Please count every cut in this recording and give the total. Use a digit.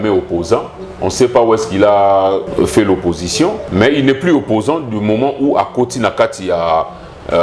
2